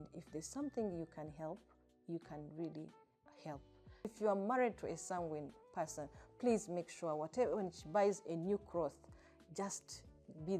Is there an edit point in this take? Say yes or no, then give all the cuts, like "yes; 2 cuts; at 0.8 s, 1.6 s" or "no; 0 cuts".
yes; 1 cut; at 4.1 s